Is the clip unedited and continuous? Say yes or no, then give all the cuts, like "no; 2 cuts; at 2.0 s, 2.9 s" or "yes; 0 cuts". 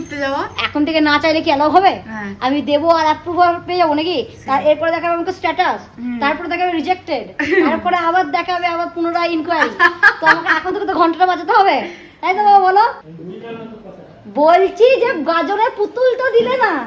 yes; 0 cuts